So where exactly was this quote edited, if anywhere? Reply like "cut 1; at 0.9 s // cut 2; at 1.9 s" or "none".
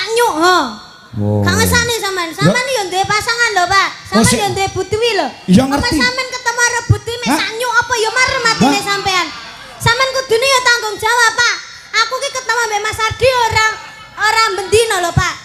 none